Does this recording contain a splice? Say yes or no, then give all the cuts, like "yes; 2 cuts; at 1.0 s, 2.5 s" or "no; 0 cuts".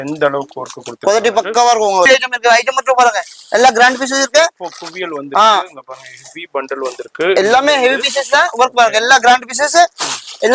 yes; 1 cut; at 2.1 s